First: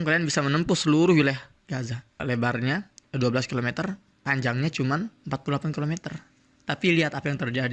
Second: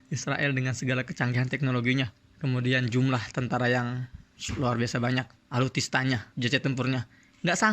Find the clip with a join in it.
second; 2 cuts; at 5.4 s, 6.3 s

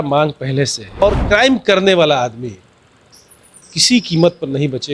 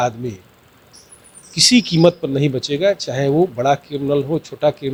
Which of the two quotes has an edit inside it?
first; 1 cut; at 1.0 s

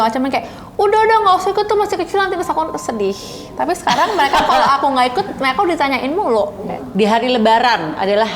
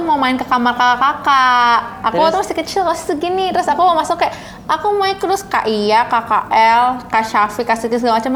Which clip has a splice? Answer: first; 1 cut; at 6.6 s

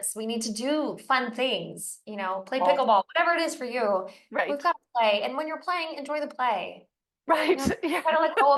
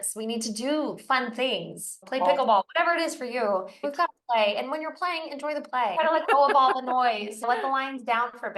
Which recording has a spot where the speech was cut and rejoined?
second; 4 cuts; at 2.0 s, 3.8 s, 5.9 s, 7.5 s

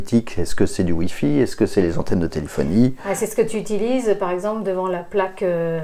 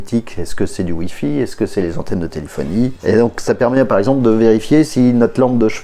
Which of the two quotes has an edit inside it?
second; 1 cut; at 3.0 s

